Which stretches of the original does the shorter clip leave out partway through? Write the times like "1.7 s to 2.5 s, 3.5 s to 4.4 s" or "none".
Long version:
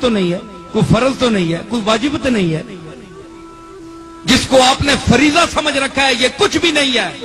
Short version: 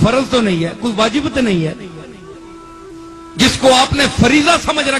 none

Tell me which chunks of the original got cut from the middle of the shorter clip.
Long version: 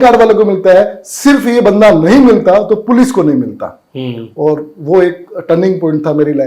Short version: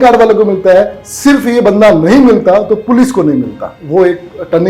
3.8 s to 4.7 s

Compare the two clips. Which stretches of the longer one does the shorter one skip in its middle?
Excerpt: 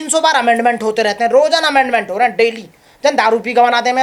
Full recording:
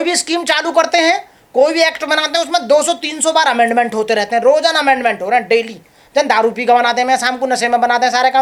none

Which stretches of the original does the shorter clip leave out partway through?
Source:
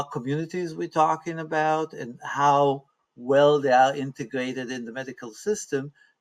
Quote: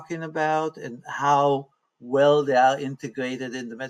none

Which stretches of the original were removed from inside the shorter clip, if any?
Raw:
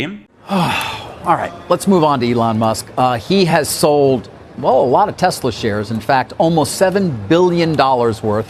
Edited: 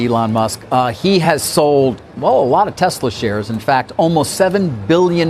4.3 s to 4.5 s

